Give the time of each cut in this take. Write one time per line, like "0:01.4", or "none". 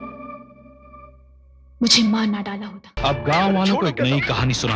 0:03.0